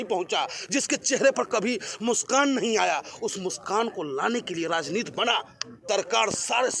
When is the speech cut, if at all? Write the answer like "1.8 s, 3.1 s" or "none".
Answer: 5.8 s